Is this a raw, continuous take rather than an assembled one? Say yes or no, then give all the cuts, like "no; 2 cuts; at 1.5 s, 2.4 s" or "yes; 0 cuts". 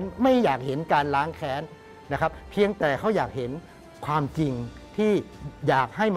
yes; 0 cuts